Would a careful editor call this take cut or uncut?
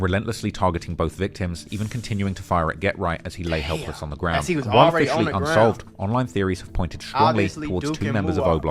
uncut